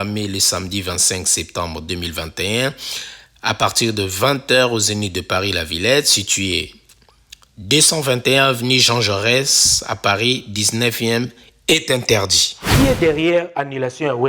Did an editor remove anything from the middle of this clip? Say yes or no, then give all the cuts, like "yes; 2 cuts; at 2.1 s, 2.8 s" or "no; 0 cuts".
yes; 1 cut; at 12.7 s